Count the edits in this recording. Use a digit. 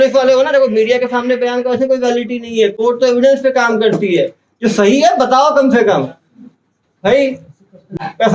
0